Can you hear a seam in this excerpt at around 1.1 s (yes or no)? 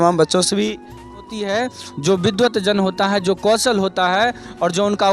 yes